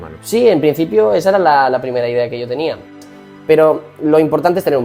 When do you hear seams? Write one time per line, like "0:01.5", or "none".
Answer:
0:03.0